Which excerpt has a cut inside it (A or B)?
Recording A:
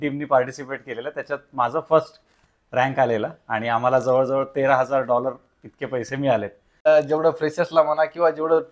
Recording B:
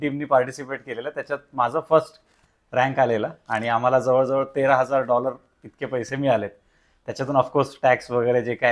A